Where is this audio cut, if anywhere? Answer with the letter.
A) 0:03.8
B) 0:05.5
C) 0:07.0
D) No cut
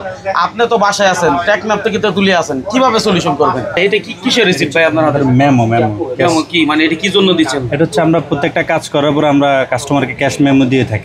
A